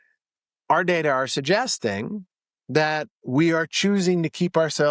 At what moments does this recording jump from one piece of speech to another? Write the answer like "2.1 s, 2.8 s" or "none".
none